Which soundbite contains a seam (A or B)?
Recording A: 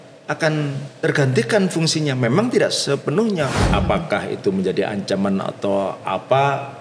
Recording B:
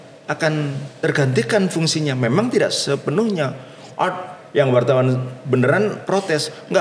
A